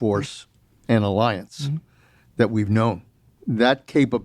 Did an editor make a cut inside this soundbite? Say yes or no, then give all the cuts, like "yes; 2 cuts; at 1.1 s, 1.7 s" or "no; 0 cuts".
yes; 1 cut; at 3.2 s